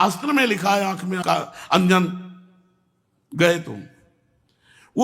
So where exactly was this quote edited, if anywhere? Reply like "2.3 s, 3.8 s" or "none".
1.2 s